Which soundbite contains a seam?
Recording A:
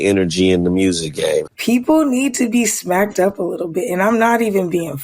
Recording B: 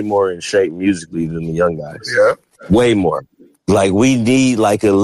A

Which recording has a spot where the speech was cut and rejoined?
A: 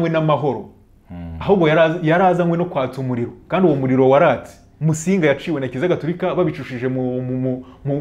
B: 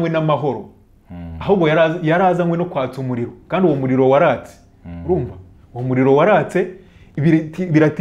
A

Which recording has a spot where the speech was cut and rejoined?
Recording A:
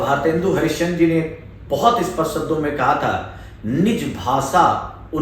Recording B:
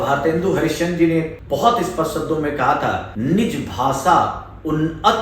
B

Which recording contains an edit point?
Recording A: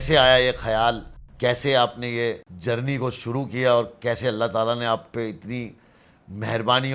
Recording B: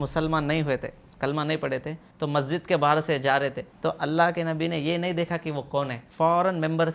B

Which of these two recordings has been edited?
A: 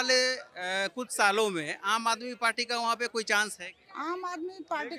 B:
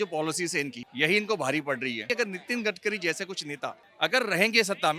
B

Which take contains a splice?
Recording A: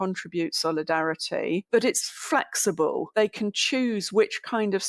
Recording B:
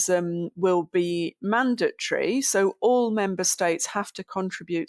A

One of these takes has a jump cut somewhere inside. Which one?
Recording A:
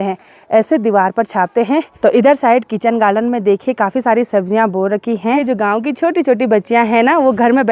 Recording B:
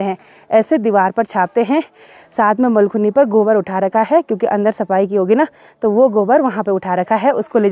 A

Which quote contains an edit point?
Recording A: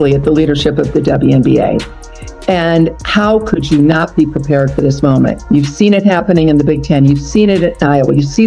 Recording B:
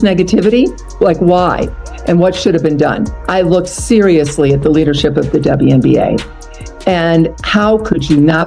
B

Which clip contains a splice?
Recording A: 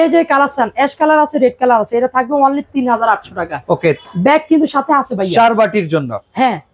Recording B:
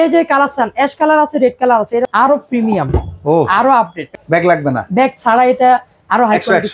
B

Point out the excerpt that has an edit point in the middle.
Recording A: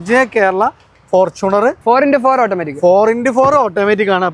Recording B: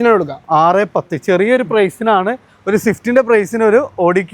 A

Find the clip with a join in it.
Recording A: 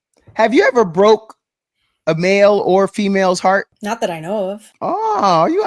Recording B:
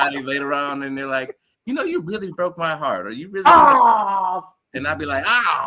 A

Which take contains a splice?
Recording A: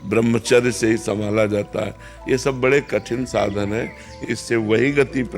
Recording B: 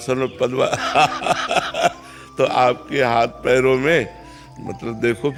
A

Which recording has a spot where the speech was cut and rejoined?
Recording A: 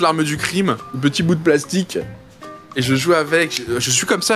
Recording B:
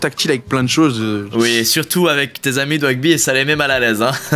A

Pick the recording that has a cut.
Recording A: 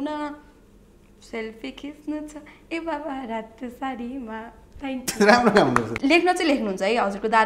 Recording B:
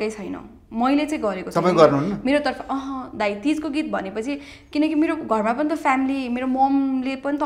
A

